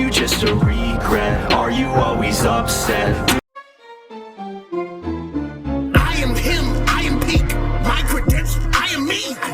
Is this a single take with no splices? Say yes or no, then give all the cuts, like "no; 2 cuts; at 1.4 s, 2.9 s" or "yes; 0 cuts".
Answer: no; 1 cut; at 3.4 s